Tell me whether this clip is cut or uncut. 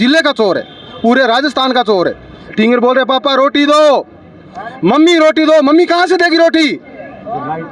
cut